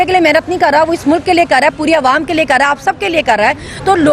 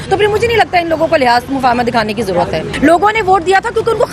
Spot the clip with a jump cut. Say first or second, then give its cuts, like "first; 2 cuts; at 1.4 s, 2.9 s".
second; 1 cut; at 2.7 s